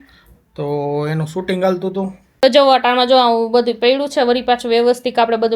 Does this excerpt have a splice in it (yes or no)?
yes